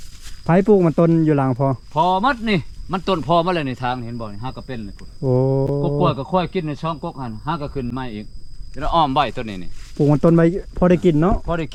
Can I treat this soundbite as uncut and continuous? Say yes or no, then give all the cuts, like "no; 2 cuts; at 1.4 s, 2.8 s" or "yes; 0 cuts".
yes; 0 cuts